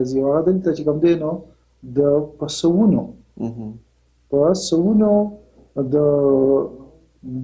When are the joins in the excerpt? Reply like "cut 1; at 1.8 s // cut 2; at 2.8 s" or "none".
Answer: none